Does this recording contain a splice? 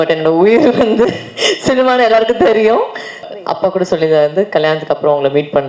yes; 1 cut; at 3.3 s

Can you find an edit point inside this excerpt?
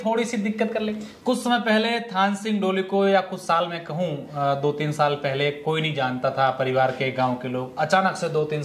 yes; 1 cut; at 1.1 s

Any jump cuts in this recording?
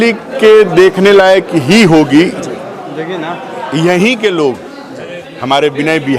yes; 1 cut; at 2.6 s

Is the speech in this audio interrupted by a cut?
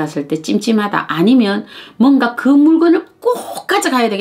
no; 0 cuts

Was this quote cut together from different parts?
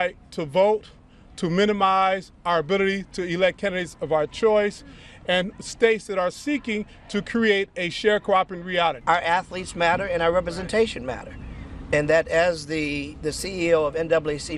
yes; 1 cut; at 9.0 s

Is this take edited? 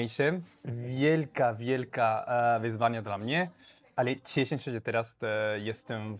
no; 0 cuts

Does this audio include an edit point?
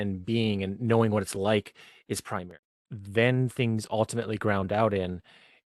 yes; 1 cut; at 2.5 s

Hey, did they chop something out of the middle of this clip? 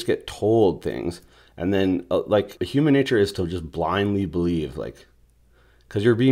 yes; 1 cut; at 2.6 s

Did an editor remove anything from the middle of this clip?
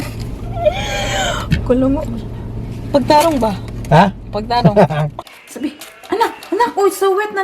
yes; 1 cut; at 5.2 s

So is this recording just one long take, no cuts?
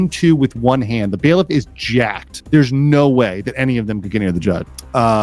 yes; 0 cuts

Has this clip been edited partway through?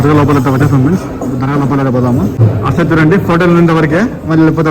yes; 1 cut; at 2.4 s

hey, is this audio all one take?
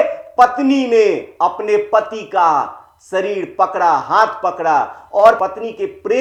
yes; 0 cuts

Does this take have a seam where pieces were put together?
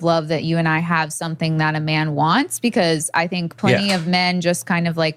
no; 0 cuts

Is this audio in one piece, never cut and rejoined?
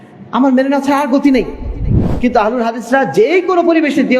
no; 1 cut; at 2.0 s

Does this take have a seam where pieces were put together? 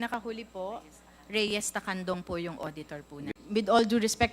yes; 1 cut; at 3.4 s

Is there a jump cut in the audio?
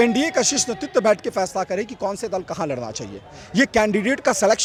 no; 0 cuts

